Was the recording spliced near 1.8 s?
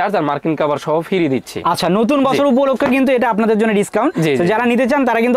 no; 0 cuts

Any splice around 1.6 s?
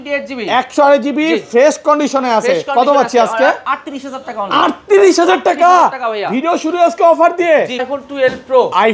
no; 1 cut; at 7.9 s

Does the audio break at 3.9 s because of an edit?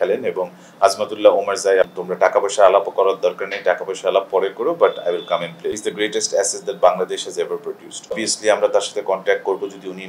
no; 3 cuts; at 2.0 s, 5.8 s, 8.1 s

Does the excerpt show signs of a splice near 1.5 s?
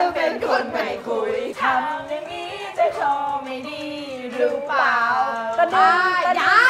yes; 1 cut; at 1.5 s

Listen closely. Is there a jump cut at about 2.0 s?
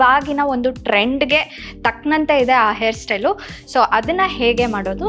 no; 0 cuts

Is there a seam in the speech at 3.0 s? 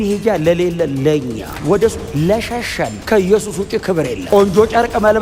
yes; 1 cut; at 3.0 s

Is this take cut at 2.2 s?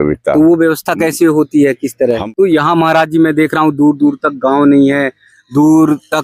yes; 1 cut; at 2.2 s

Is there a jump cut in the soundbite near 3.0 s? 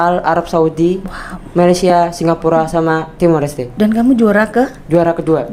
no; 0 cuts

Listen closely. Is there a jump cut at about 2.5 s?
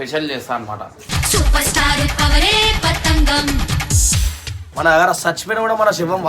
no; 1 cut; at 4.6 s

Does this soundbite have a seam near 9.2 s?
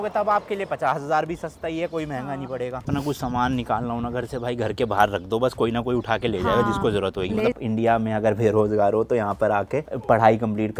no; 2 cuts; at 2.9 s, 7.5 s

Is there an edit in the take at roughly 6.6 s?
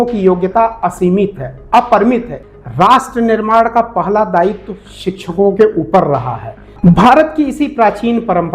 yes; 2 cuts; at 2.4 s, 6.6 s

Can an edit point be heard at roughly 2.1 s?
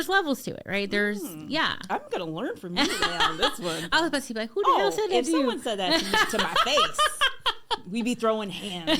no; 1 cut; at 3.9 s

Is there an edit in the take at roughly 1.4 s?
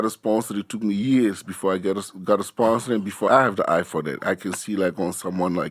no; 1 cut; at 3.3 s

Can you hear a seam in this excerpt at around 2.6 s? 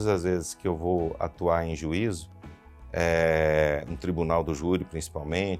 no; 0 cuts

